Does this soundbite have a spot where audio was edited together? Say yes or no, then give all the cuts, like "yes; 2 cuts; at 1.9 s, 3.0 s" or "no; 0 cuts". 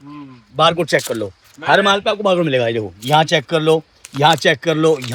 no; 0 cuts